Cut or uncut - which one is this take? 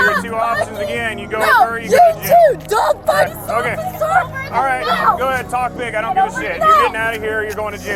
cut